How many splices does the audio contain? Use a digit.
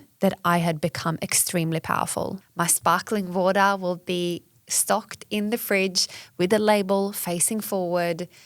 1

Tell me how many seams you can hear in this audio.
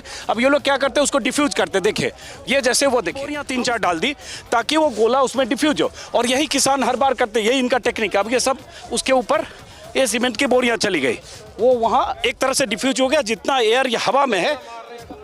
1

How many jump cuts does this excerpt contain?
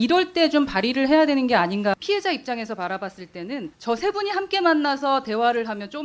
2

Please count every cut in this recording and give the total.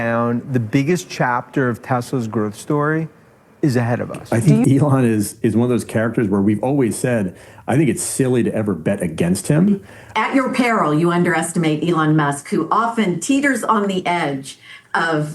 2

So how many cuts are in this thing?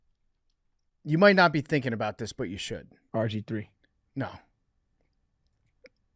1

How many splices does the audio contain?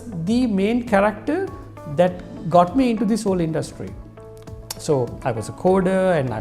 0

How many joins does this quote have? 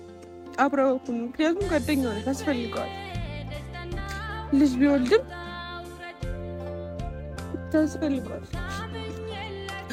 0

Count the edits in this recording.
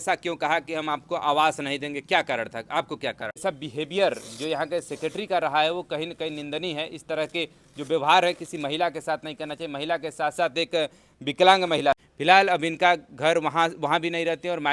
2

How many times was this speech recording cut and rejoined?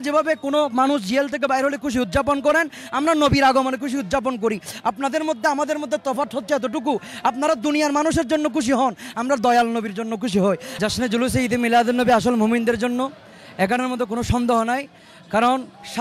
1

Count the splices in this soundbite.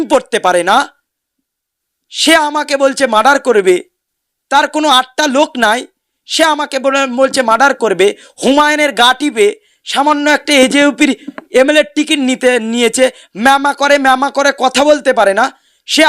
0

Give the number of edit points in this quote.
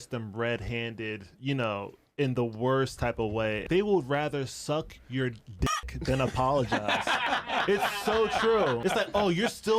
3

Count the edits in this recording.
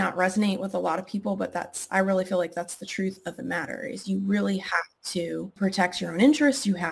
1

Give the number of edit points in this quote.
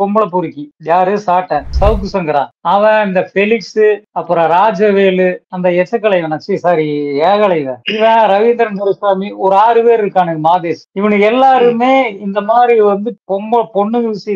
3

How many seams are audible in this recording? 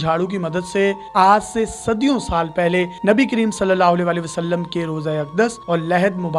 1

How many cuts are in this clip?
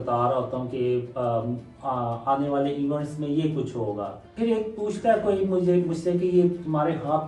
1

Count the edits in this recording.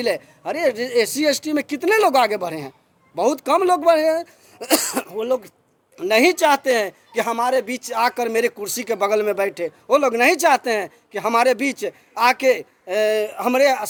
0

